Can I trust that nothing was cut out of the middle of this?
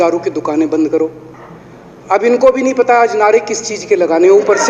yes; 0 cuts

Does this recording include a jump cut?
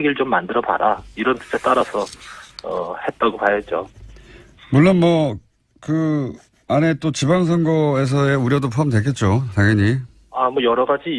yes; 1 cut; at 8.6 s

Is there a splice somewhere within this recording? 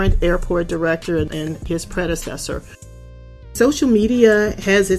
yes; 2 cuts; at 1.6 s, 3.3 s

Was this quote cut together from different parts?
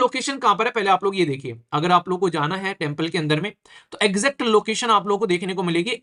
no; 0 cuts

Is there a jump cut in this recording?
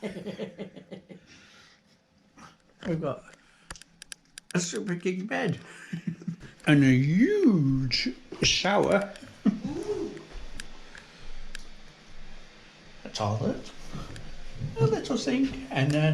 yes; 1 cut; at 6.5 s

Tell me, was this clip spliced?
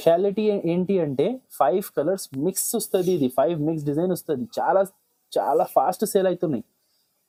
no; 0 cuts

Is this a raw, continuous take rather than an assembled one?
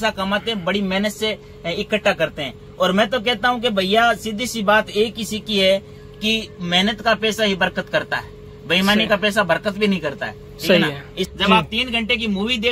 no; 1 cut; at 11.3 s

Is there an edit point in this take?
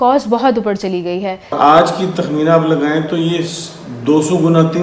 yes; 1 cut; at 1.5 s

